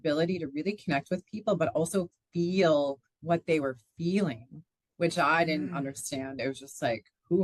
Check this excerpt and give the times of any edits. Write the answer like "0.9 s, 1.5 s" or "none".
6.4 s